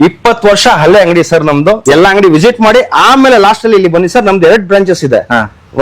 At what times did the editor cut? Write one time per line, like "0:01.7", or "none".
0:01.8